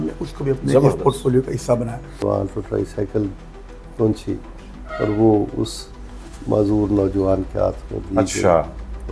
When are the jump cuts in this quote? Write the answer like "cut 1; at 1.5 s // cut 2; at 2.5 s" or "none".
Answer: cut 1; at 2.2 s